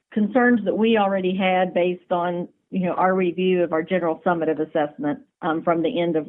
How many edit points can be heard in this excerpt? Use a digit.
1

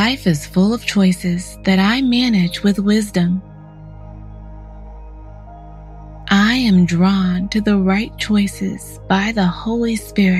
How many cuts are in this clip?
0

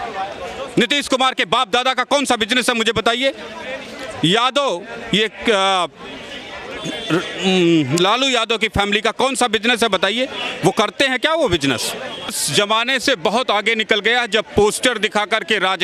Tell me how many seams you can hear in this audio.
1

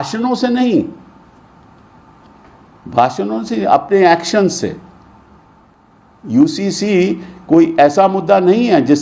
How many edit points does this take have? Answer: 1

